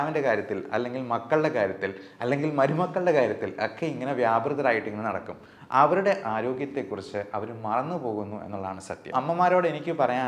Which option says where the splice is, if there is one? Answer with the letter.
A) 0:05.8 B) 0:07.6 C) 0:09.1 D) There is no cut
C